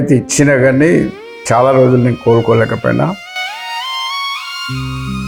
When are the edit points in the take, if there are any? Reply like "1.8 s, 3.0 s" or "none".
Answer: none